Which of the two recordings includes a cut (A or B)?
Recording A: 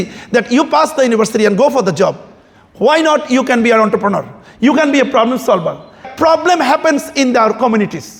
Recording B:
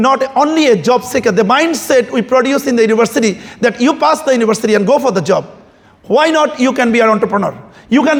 A